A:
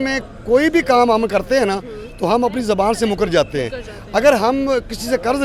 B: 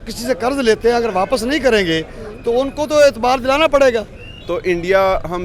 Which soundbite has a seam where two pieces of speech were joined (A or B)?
B